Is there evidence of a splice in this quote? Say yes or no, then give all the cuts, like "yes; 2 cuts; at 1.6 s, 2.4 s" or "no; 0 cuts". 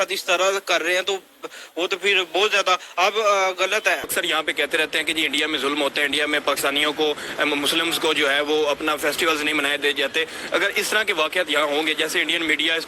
yes; 1 cut; at 4.1 s